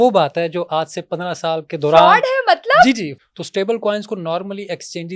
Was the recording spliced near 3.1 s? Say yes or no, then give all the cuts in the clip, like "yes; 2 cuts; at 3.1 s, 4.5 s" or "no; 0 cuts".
yes; 1 cut; at 3.1 s